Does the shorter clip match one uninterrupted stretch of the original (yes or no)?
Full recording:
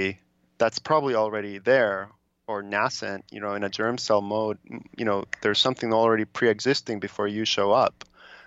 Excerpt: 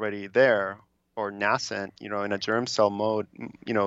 yes